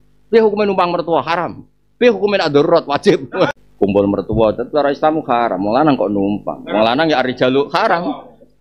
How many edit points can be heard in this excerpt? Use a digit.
1